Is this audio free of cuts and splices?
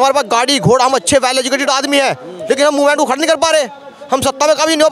yes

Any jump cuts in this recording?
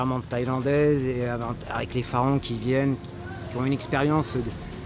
no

